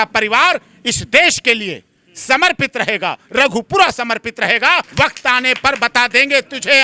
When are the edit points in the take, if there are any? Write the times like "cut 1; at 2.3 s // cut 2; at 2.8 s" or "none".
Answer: cut 1; at 4.9 s